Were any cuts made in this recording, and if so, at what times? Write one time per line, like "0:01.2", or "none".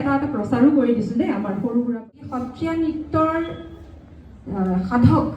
0:02.3